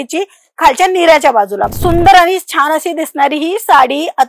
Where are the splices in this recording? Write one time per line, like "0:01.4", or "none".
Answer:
0:01.6